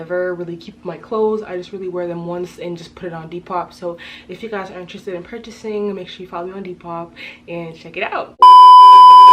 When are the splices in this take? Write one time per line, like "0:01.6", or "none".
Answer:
0:08.4